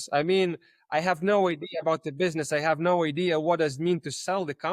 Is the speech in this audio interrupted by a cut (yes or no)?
no